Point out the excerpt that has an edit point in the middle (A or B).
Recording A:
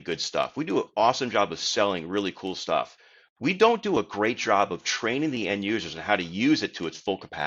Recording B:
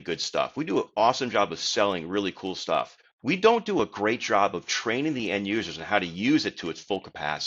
B